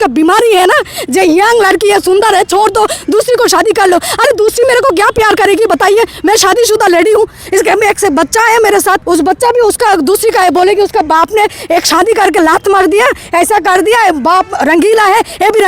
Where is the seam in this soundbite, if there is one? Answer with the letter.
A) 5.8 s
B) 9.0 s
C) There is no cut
B